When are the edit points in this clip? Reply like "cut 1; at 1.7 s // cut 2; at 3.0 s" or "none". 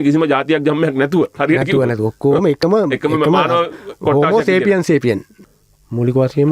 cut 1; at 5.3 s

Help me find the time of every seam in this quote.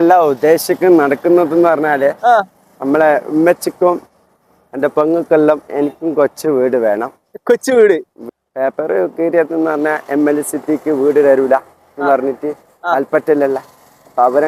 cut 1; at 8.2 s

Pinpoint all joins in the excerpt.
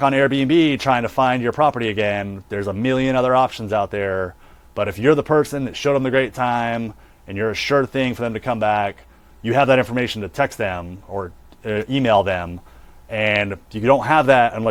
none

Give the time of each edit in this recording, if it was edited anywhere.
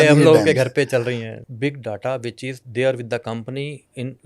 cut 1; at 1.2 s

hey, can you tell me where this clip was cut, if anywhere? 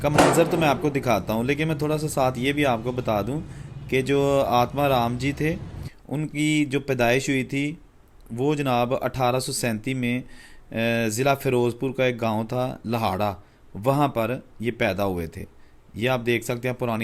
none

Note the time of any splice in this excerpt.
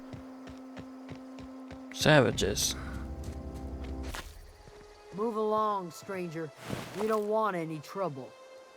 cut 1; at 4.1 s

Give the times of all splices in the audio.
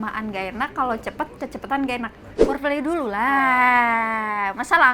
cut 1; at 2.2 s

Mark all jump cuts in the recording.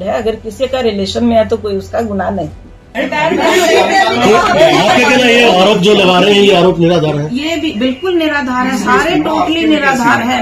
cut 1; at 2.8 s

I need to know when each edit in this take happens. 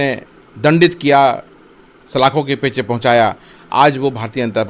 none

